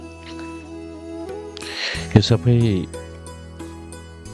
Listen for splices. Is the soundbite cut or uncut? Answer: uncut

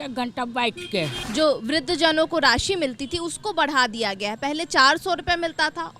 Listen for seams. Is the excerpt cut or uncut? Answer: cut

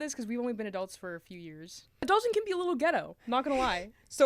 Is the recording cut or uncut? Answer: uncut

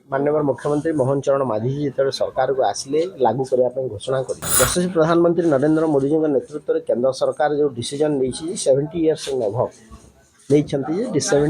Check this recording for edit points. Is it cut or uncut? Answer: cut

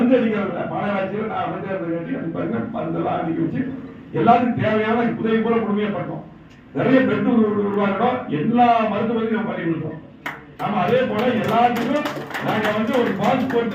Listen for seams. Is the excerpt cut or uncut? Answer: uncut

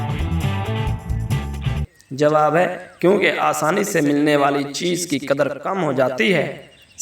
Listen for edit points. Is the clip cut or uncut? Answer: cut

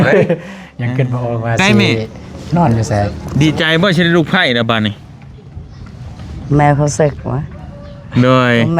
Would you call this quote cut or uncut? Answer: cut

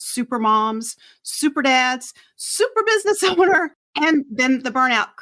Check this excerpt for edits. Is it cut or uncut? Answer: cut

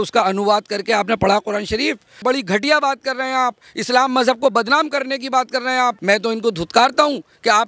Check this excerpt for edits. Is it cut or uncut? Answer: cut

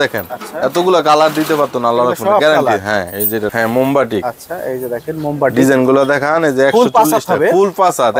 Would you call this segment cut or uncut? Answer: cut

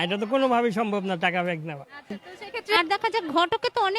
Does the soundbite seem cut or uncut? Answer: cut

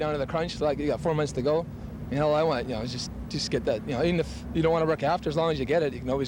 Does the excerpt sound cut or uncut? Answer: uncut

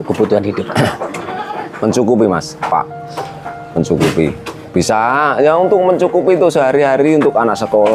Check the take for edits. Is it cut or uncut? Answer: uncut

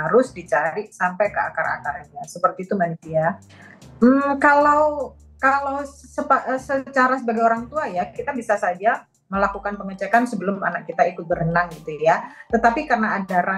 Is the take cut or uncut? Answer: uncut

